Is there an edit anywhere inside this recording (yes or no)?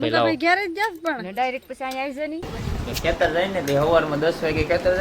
yes